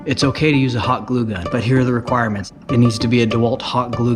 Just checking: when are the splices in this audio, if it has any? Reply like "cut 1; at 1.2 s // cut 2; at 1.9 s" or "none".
cut 1; at 1.4 s // cut 2; at 2.5 s